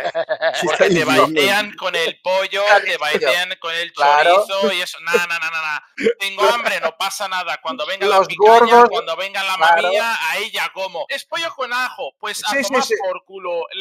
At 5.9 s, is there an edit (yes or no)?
yes